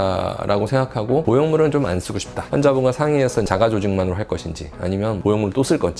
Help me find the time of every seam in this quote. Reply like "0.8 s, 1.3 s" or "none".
2.5 s, 3.5 s